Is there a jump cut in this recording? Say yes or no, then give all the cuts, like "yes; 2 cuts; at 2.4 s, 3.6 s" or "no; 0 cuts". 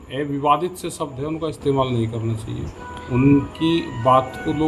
no; 0 cuts